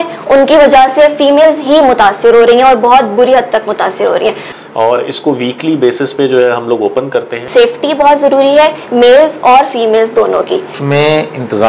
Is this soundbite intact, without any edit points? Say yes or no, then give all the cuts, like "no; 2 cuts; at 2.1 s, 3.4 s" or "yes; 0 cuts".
no; 3 cuts; at 4.5 s, 7.5 s, 10.7 s